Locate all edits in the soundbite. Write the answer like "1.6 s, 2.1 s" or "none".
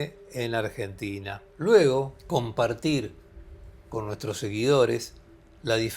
2.2 s